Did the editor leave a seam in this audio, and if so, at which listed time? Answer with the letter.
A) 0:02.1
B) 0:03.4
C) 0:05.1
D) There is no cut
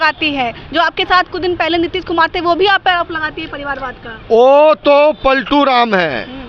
D